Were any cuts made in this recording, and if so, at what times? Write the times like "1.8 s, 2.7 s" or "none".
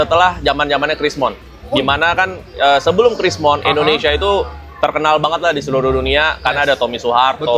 none